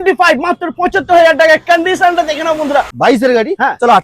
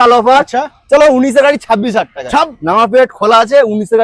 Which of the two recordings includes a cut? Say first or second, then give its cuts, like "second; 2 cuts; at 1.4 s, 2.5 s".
first; 1 cut; at 2.9 s